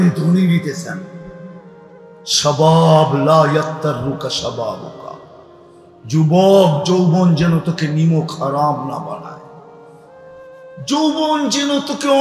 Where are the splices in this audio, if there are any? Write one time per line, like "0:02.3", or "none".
none